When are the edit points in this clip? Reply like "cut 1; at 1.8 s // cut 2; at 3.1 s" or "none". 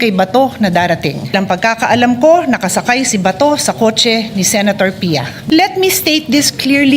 cut 1; at 1.3 s // cut 2; at 5.3 s